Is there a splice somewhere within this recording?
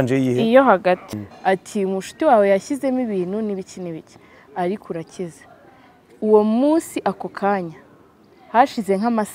yes; 1 cut; at 1.2 s

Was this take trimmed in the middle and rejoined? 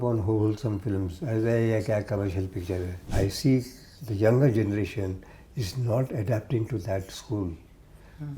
yes; 1 cut; at 3.0 s

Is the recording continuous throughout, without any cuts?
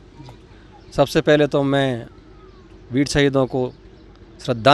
yes; 0 cuts

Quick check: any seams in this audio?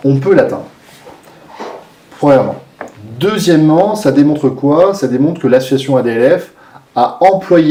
no; 0 cuts

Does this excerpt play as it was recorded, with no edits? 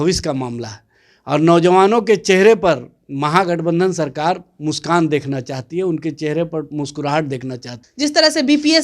no; 1 cut; at 7.8 s

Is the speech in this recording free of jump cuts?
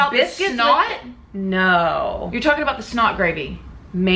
yes; 0 cuts

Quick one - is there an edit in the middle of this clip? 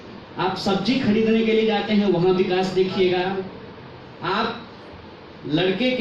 no; 0 cuts

